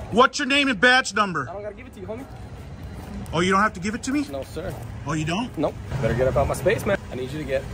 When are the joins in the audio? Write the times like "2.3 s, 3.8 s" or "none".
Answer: 5.9 s, 7.0 s